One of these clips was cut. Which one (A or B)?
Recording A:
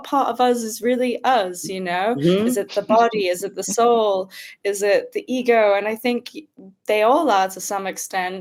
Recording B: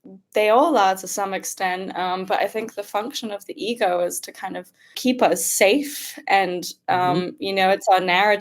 B